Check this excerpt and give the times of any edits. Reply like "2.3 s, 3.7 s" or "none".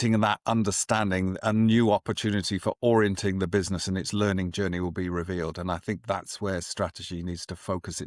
none